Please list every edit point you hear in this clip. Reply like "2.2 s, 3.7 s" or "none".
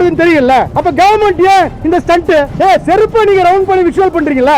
2.5 s